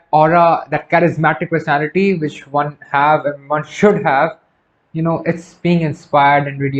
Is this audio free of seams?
yes; 0 cuts

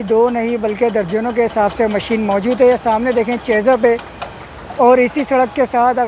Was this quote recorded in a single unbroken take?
yes; 0 cuts

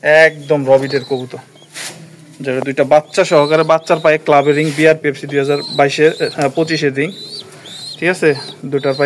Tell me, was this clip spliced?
no; 0 cuts

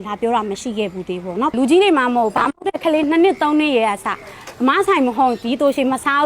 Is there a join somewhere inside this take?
yes; 1 cut; at 1.5 s

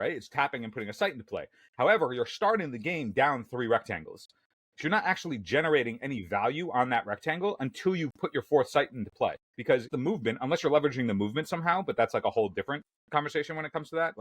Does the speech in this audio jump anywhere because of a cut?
yes; 1 cut; at 9.8 s

